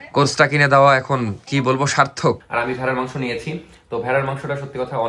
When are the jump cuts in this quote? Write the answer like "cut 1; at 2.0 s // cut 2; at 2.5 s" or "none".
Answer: cut 1; at 2.4 s